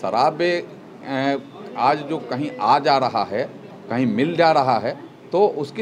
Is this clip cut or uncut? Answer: uncut